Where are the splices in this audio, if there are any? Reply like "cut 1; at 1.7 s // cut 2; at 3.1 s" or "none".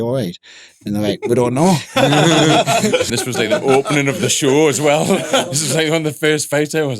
cut 1; at 3.0 s